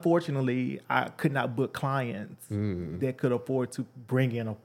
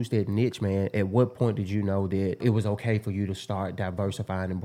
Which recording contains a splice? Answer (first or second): second